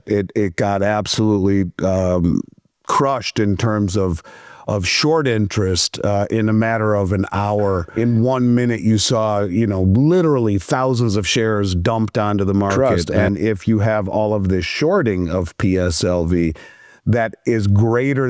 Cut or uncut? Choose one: cut